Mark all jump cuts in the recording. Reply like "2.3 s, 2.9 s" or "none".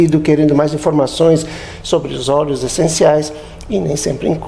1.1 s